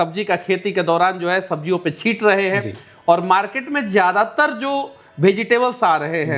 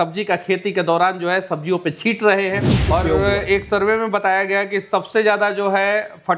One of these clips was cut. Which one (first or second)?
second